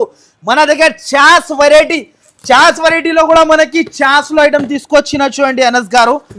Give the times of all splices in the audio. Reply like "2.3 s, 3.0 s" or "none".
none